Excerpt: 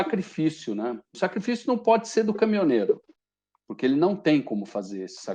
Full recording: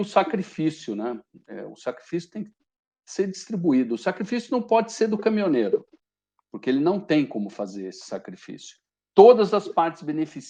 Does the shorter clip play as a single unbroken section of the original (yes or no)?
no